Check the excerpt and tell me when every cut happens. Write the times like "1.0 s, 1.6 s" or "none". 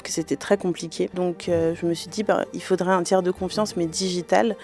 1.2 s